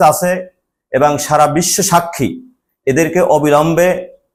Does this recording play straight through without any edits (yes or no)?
yes